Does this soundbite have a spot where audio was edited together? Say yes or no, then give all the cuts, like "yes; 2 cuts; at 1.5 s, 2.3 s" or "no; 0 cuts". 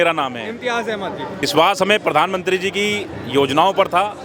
yes; 1 cut; at 1.4 s